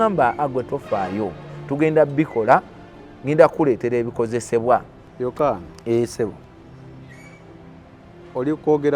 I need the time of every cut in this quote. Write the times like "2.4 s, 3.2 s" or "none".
5.0 s